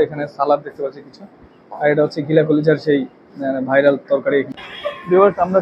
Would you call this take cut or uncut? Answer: cut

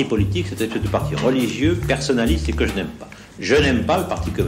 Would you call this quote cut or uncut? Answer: uncut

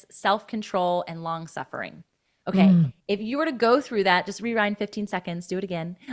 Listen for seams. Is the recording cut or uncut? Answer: uncut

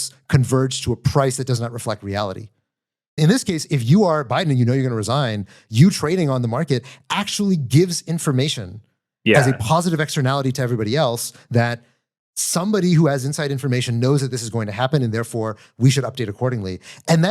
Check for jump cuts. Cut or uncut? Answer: cut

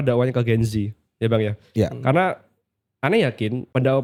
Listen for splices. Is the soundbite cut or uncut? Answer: uncut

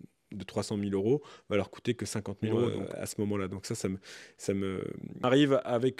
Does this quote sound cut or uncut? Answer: cut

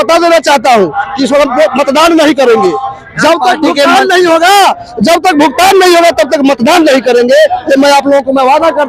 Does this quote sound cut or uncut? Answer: uncut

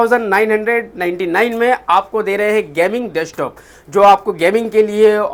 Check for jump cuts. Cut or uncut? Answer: uncut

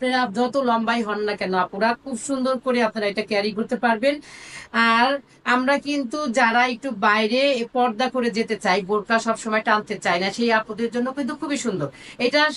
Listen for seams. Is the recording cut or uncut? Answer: uncut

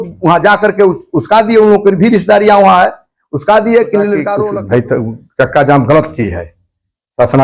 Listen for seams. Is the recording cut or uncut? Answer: cut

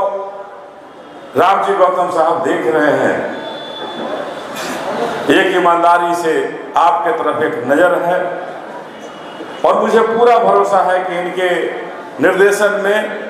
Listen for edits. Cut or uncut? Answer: uncut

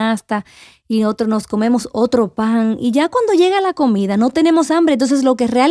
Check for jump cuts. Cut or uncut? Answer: cut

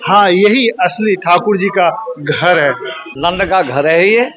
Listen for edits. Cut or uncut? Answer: cut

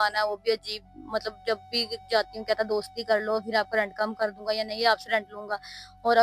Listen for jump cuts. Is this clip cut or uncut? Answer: uncut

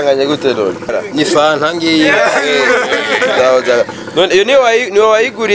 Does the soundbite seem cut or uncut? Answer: cut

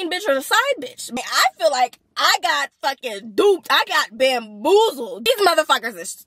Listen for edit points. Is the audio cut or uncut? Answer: cut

